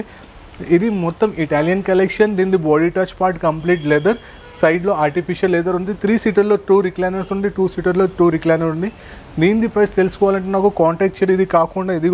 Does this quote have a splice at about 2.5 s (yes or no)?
no